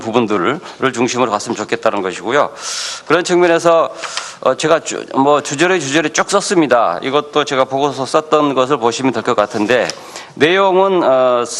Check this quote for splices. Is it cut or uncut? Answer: uncut